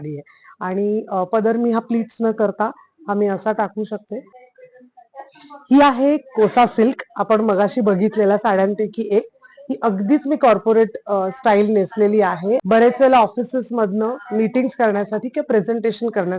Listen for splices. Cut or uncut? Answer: cut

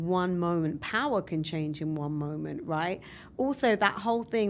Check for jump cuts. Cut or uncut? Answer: uncut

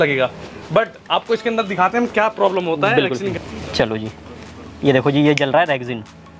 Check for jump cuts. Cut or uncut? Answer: cut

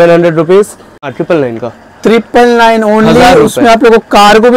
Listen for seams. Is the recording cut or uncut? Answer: cut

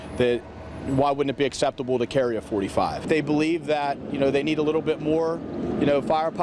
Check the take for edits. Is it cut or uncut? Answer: cut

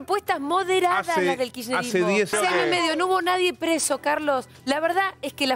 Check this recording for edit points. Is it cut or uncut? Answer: cut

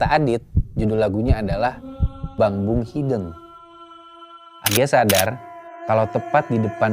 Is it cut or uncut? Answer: cut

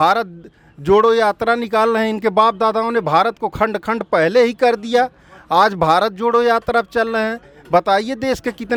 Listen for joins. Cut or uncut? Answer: uncut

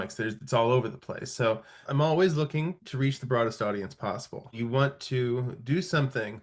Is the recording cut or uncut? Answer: cut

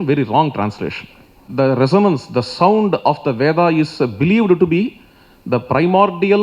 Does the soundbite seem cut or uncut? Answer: cut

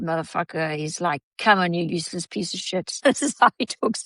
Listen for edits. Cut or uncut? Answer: cut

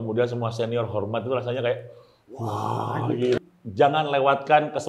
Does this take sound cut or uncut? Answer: cut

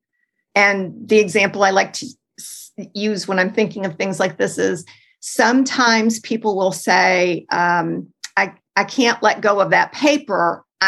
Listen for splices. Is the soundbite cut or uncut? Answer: uncut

